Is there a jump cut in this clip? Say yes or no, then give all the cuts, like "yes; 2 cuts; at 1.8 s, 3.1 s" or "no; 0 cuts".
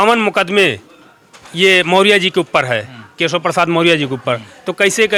no; 0 cuts